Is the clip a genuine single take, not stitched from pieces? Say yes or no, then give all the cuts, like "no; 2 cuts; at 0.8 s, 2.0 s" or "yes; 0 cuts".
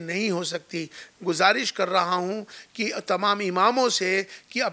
no; 1 cut; at 1.1 s